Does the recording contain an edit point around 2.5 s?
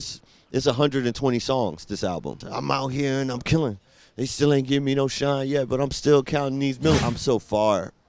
yes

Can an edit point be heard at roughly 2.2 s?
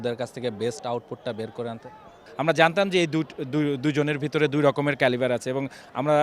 yes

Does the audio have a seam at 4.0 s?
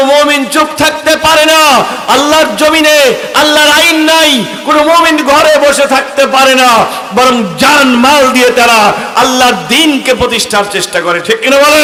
no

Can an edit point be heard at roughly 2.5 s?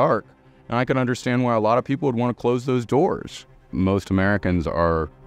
no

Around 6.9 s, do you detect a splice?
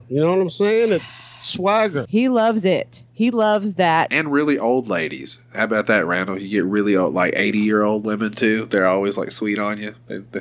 no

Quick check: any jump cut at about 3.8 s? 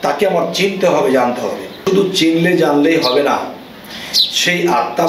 no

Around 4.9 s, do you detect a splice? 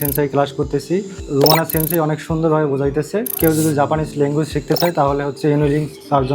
no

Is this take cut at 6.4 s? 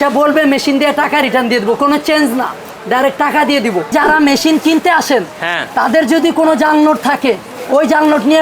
no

